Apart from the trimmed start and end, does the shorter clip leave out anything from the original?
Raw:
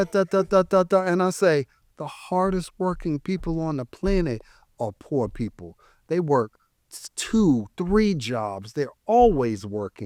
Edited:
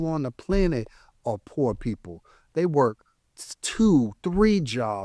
no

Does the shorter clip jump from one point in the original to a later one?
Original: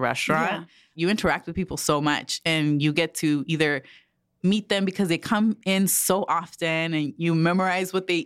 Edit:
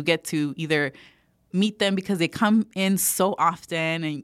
no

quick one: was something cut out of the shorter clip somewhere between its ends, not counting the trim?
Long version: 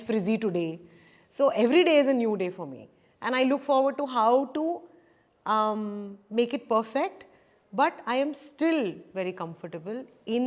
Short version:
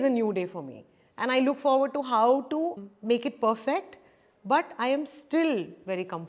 yes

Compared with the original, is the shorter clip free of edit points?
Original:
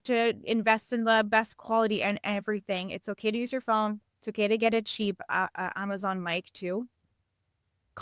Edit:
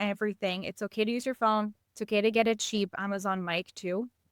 no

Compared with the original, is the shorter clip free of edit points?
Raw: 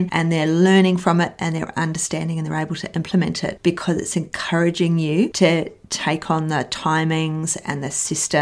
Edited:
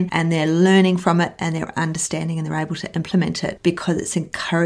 yes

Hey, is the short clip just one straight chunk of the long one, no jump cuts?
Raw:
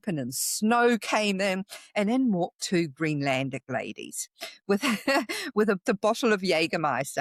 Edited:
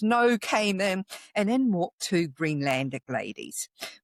yes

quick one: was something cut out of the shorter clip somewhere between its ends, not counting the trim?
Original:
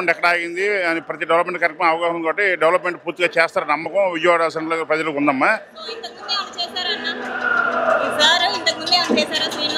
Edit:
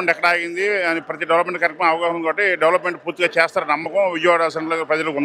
no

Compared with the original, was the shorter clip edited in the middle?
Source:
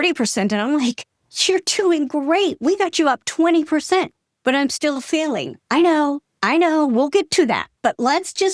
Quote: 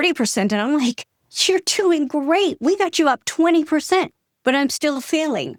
no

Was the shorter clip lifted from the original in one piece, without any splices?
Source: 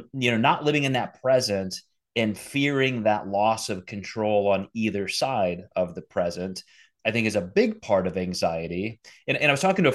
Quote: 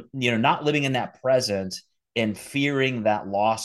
yes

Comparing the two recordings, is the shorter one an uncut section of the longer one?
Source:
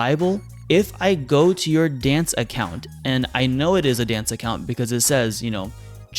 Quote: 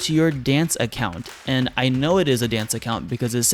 yes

